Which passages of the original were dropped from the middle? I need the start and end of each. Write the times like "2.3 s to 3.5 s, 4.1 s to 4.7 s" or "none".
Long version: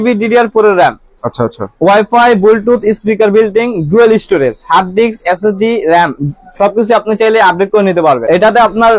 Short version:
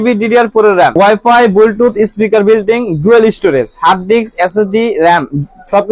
0.9 s to 1.8 s